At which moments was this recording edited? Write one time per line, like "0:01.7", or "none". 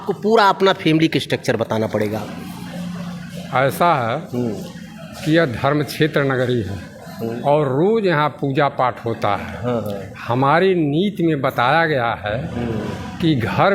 none